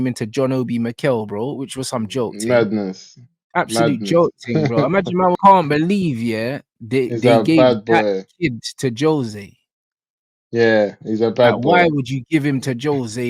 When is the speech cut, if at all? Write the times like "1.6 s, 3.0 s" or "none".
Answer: 5.4 s